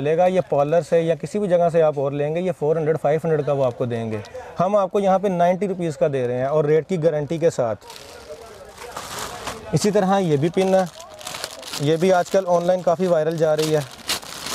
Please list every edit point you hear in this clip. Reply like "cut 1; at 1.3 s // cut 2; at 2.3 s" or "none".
none